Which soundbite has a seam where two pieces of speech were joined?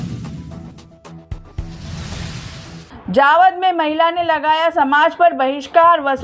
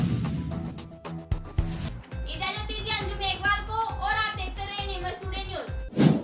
first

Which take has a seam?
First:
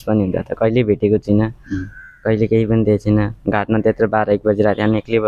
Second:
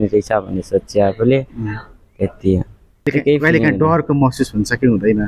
second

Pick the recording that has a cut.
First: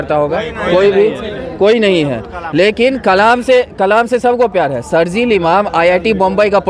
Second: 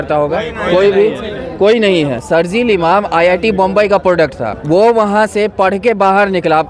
second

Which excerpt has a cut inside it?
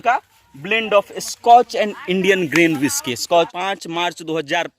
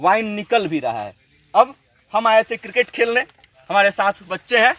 first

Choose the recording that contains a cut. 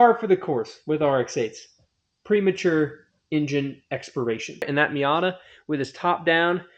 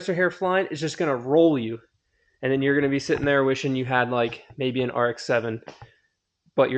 first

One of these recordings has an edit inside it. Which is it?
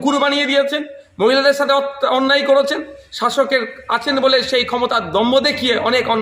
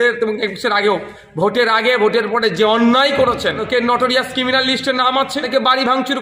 second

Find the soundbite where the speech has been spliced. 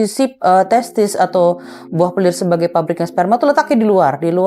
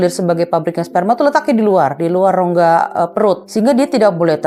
second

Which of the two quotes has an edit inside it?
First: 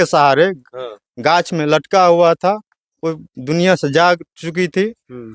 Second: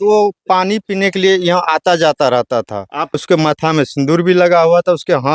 second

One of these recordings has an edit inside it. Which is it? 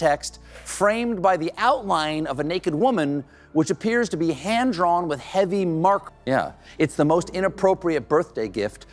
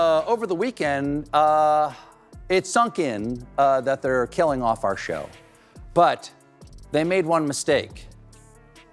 first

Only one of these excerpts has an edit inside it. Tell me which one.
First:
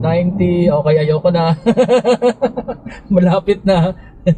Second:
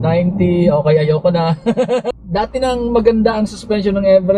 second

